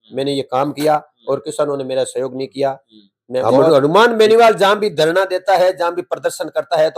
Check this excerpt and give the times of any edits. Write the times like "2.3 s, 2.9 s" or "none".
3.7 s